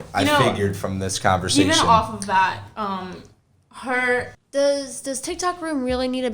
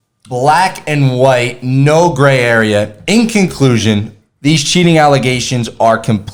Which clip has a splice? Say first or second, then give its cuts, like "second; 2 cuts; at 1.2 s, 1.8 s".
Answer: first; 1 cut; at 4.4 s